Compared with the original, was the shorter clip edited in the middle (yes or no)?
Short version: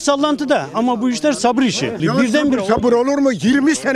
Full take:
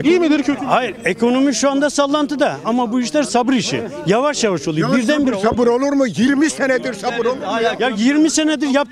yes